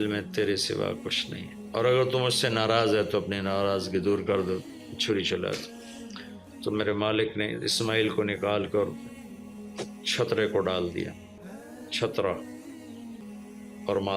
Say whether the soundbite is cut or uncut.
cut